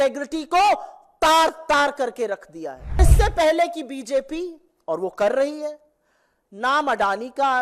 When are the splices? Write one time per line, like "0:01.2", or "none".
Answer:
0:03.0